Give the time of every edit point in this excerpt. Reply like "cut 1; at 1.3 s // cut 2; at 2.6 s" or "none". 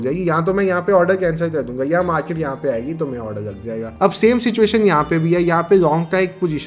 none